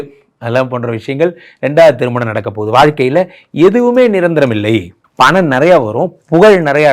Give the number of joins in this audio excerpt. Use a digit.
1